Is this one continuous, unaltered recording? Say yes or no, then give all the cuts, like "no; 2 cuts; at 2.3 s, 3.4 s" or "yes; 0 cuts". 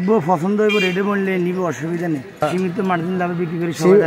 no; 1 cut; at 2.4 s